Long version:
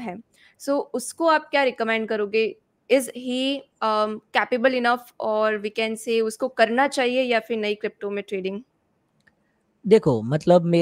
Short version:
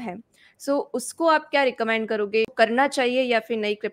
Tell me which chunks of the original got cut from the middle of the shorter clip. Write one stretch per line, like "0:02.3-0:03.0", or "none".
0:02.5-0:06.5